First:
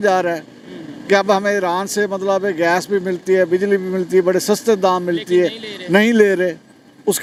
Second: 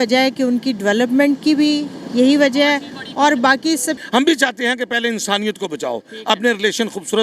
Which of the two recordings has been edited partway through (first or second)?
second